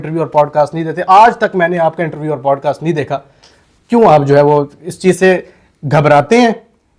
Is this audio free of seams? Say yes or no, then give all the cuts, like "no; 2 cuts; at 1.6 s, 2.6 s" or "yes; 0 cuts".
yes; 0 cuts